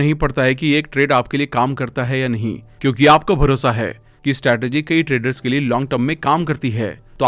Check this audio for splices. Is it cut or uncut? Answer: uncut